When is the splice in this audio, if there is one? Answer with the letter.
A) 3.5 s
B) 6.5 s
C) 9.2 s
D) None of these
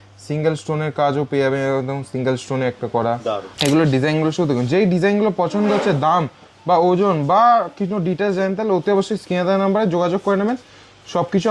A